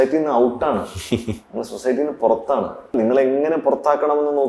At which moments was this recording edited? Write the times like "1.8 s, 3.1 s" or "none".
2.9 s